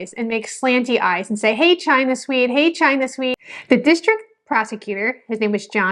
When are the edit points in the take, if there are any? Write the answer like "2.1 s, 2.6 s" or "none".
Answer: 3.4 s